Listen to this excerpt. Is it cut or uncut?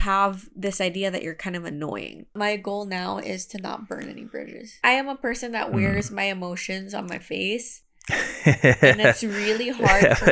cut